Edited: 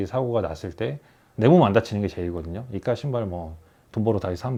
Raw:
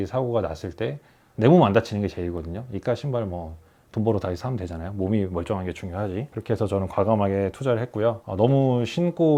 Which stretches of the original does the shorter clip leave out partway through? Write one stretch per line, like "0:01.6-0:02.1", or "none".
none